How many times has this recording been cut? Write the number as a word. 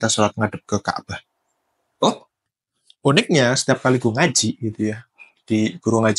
one